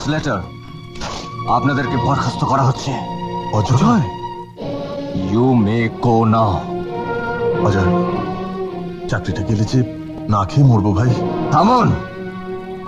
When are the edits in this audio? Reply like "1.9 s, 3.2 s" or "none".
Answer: none